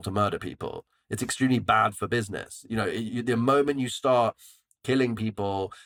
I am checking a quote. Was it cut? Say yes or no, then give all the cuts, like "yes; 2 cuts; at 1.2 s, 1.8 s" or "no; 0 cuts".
no; 0 cuts